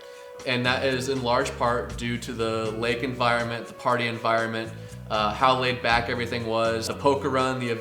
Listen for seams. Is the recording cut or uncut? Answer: cut